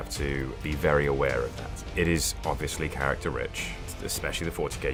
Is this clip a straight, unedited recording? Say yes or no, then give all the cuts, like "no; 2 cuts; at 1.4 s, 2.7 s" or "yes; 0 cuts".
yes; 0 cuts